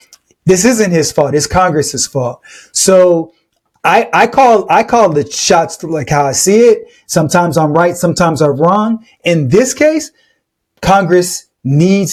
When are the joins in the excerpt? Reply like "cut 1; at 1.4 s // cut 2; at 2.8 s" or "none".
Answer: none